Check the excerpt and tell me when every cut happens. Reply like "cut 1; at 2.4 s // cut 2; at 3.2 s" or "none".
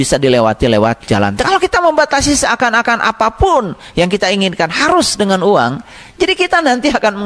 cut 1; at 1.4 s